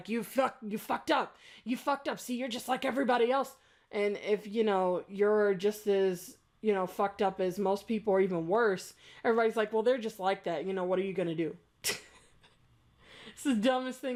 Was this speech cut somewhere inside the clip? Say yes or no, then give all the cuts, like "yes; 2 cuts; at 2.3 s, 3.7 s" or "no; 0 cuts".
no; 0 cuts